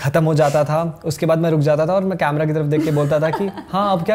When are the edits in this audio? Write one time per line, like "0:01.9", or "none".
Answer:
none